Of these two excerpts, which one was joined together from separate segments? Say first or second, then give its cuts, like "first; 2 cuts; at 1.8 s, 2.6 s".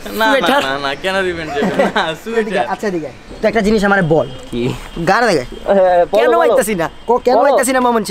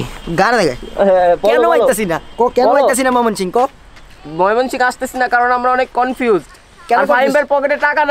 first; 1 cut; at 3.2 s